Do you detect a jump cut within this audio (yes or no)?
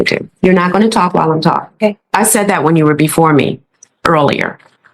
yes